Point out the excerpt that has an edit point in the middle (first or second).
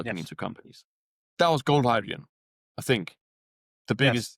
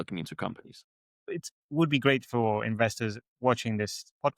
second